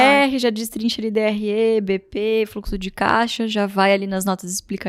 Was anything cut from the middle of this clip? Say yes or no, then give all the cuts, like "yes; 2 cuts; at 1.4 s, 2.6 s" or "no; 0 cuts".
no; 0 cuts